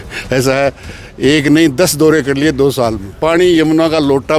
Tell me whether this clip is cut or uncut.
cut